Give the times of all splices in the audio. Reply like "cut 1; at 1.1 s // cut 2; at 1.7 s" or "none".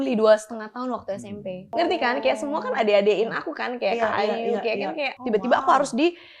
cut 1; at 1.7 s // cut 2; at 5.1 s

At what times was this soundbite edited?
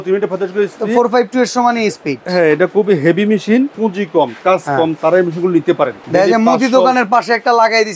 cut 1; at 3.7 s // cut 2; at 6.0 s

